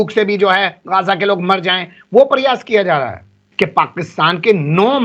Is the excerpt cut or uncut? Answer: cut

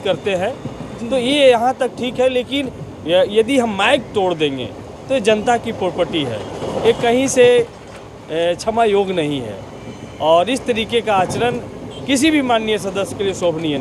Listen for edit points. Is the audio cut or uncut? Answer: uncut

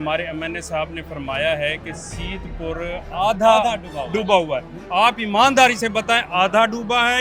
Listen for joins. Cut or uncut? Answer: uncut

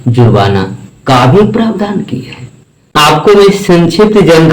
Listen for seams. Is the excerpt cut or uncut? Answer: cut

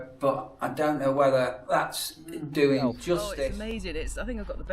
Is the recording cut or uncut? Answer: cut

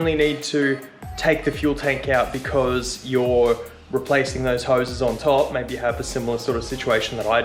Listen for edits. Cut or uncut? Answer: uncut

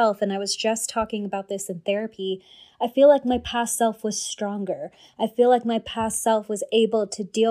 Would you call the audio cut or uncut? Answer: uncut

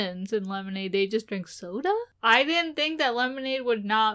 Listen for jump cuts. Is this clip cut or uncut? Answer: cut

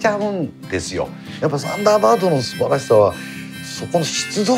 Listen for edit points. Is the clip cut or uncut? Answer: cut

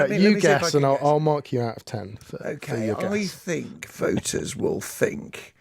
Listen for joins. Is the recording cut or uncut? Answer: uncut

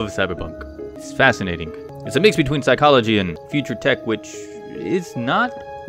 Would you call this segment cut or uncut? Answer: cut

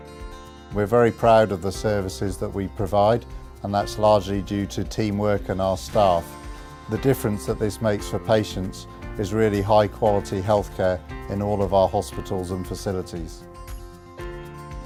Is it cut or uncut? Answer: uncut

